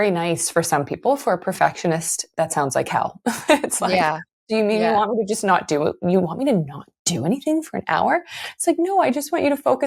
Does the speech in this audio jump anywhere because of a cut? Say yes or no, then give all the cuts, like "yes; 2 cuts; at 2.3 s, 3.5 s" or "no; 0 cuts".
no; 0 cuts